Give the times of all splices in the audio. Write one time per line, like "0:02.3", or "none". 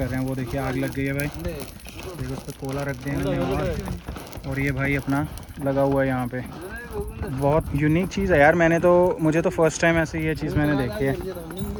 none